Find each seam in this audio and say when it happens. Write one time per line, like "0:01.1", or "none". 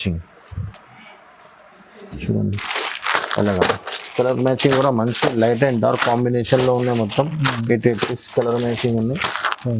none